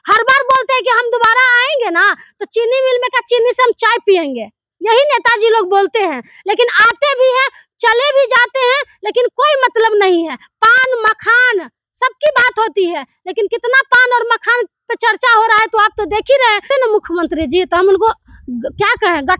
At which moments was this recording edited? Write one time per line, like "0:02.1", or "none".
0:16.6